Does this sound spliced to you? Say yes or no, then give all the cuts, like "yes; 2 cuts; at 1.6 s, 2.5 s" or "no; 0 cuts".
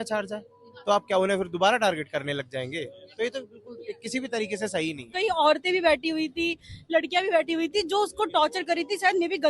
yes; 1 cut; at 5.0 s